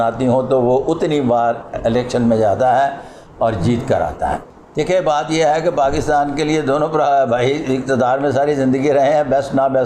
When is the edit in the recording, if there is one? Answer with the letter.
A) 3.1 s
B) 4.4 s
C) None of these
B